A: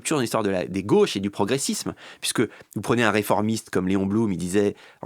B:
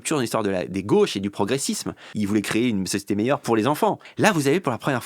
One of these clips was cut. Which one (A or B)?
B